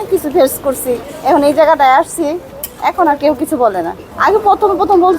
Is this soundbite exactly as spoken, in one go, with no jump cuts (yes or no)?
no